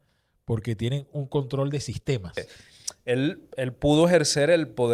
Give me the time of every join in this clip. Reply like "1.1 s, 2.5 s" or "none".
2.4 s